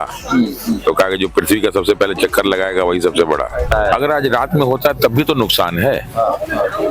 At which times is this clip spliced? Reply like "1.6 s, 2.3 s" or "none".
3.7 s